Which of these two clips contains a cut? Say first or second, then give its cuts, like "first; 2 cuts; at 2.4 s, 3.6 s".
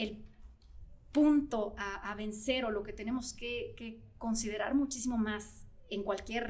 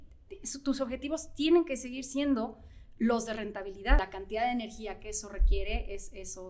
second; 1 cut; at 4.0 s